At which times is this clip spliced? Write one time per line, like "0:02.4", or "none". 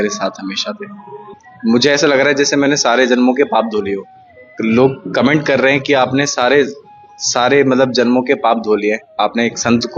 0:01.3